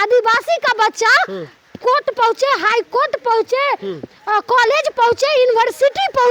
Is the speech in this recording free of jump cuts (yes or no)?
yes